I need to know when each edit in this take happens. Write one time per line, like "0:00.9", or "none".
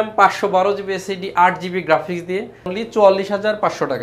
0:02.8